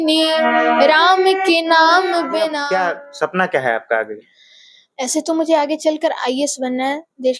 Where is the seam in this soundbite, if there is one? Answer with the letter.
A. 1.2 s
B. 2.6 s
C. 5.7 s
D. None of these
B